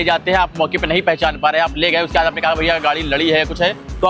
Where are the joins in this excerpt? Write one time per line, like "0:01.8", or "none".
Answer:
none